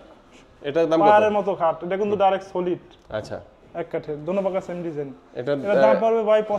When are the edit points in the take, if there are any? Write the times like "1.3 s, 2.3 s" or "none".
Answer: none